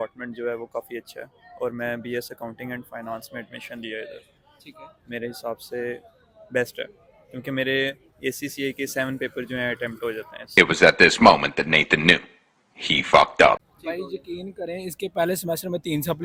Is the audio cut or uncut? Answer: uncut